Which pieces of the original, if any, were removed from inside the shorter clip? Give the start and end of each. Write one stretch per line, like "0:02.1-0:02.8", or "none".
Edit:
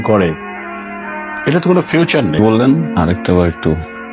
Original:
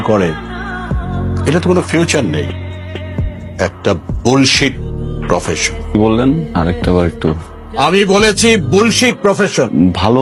0:02.4-0:06.0